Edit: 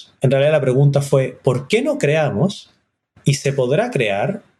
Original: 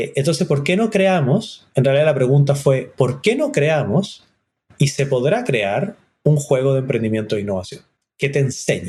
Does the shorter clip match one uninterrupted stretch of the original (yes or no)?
yes